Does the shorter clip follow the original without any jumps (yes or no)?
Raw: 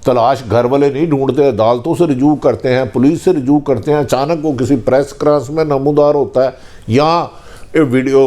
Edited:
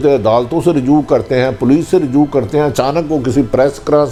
yes